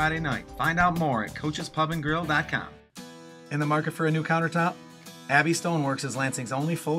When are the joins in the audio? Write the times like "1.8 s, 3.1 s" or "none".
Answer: 2.9 s